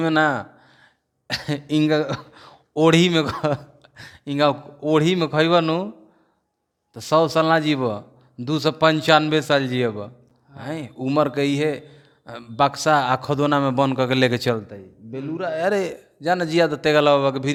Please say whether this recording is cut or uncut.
uncut